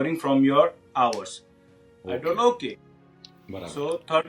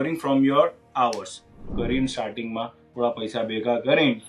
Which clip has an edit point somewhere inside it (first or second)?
second